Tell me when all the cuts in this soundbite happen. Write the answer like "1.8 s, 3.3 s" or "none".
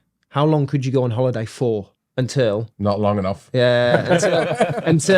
2.0 s